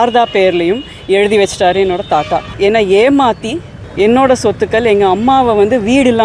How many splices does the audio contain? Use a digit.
1